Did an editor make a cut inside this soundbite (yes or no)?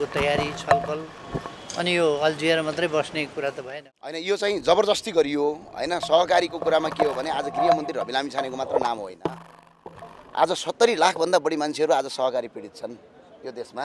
yes